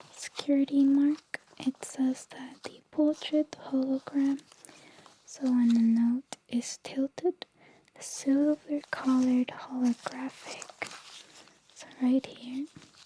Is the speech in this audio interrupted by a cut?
no; 0 cuts

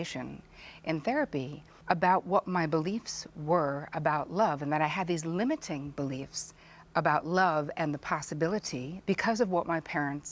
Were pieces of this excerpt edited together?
yes; 2 cuts; at 1.7 s, 8.9 s

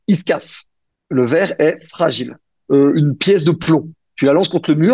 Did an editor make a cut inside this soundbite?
yes; 1 cut; at 2.6 s

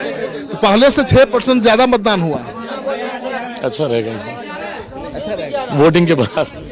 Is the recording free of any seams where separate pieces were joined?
yes; 0 cuts

